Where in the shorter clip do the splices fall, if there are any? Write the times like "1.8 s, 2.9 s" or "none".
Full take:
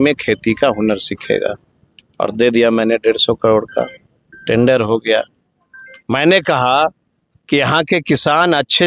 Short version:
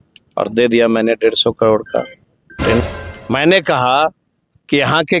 2.8 s